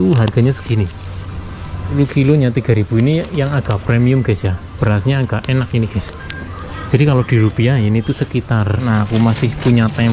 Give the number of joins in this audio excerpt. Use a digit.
2